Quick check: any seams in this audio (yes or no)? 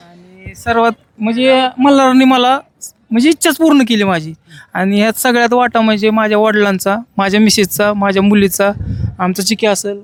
no